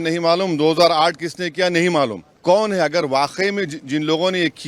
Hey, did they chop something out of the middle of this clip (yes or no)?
yes